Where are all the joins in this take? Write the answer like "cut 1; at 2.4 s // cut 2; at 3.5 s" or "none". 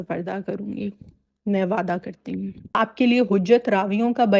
cut 1; at 2.8 s